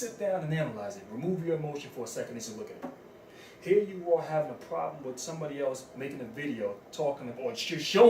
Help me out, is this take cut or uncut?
cut